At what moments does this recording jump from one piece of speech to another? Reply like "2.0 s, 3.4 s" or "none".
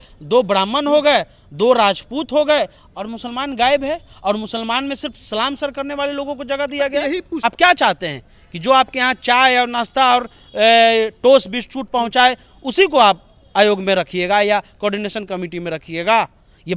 7.4 s